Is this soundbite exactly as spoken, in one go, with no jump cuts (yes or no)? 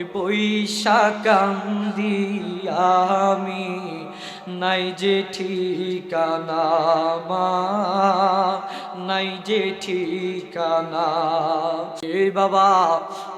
no